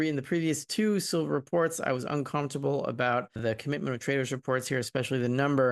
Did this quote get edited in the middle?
yes; 1 cut; at 3.4 s

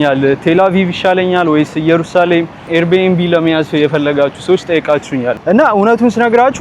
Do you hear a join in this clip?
yes; 1 cut; at 5.4 s

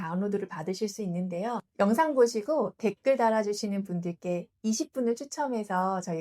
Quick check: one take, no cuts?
yes; 0 cuts

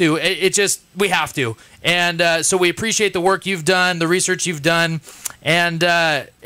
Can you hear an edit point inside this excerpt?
yes; 1 cut; at 4.2 s

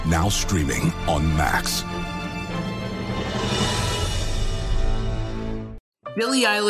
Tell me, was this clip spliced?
yes; 1 cut; at 5.8 s

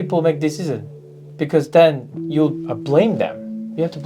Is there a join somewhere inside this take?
yes; 1 cut; at 2.7 s

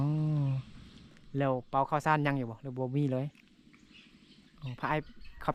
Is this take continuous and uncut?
yes; 0 cuts

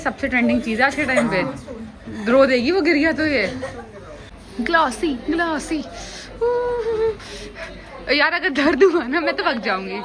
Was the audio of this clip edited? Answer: no; 0 cuts

